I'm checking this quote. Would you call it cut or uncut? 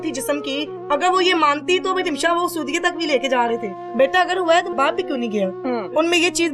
cut